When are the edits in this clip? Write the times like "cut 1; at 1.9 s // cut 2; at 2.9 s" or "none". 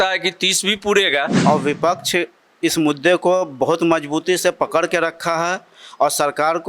cut 1; at 1.3 s